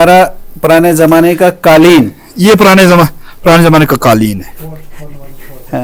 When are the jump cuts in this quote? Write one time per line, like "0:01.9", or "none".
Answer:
none